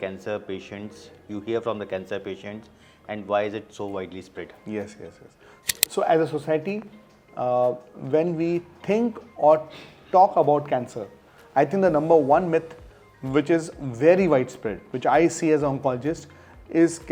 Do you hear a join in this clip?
no; 0 cuts

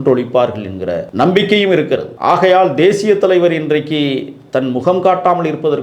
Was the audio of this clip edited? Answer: yes; 2 cuts; at 1.1 s, 2.1 s

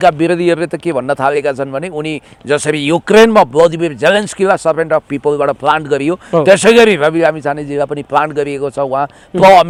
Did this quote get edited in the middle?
no; 0 cuts

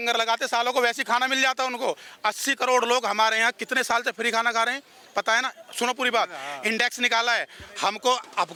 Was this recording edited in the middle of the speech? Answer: no; 0 cuts

